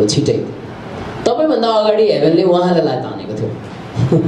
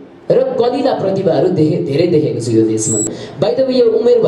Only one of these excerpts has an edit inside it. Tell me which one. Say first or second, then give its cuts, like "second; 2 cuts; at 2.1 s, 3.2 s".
second; 1 cut; at 3.2 s